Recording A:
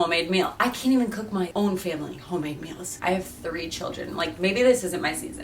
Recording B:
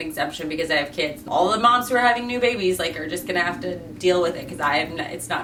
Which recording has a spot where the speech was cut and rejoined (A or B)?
A